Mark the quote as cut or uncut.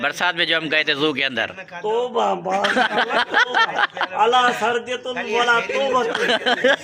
uncut